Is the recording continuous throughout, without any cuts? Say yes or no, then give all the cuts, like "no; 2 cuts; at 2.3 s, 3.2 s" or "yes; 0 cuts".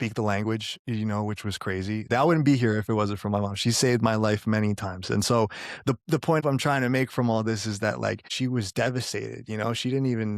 no; 3 cuts; at 2.1 s, 6.4 s, 8.3 s